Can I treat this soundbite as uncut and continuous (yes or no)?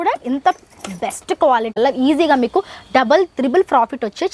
no